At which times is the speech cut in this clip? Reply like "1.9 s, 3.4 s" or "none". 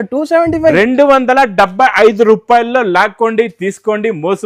none